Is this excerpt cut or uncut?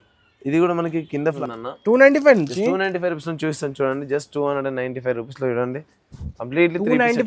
cut